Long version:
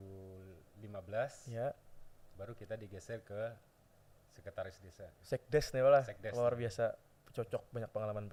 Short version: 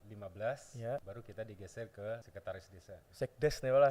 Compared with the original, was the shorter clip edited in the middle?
yes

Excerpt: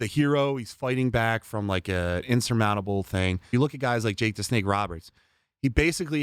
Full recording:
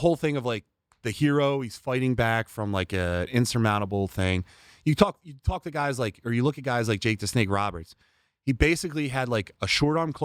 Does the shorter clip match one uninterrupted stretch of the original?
no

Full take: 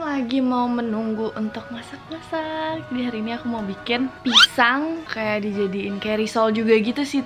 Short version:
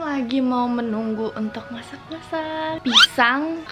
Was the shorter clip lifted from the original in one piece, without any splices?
no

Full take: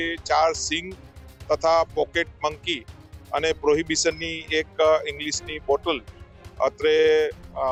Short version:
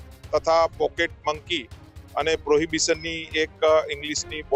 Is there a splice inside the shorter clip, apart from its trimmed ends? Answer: no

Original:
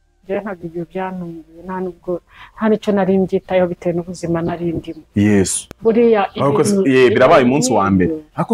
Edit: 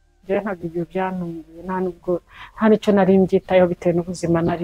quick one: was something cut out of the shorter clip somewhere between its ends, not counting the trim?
no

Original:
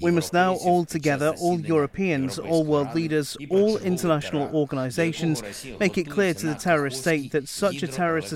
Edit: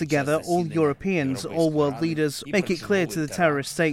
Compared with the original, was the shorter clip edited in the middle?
yes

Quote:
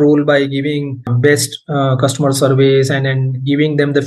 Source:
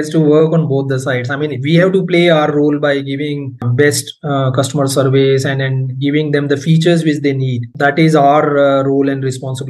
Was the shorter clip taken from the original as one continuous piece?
yes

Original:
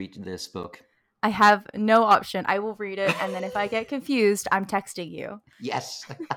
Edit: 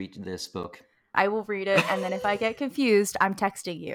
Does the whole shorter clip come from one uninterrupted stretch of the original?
no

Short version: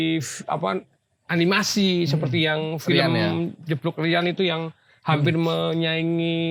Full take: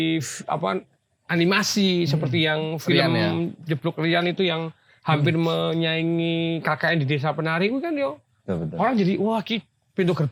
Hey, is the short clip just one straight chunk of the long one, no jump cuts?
yes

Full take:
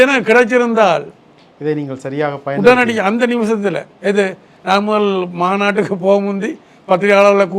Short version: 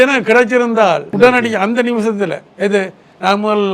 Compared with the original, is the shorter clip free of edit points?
no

